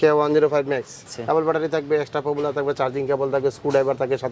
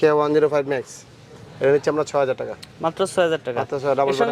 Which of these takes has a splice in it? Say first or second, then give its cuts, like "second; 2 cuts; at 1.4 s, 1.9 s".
first; 1 cut; at 1.1 s